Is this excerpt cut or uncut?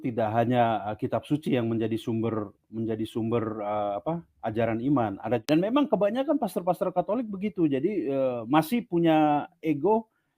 cut